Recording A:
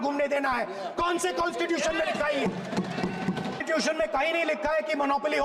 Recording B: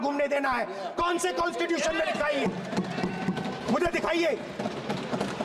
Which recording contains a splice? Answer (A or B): A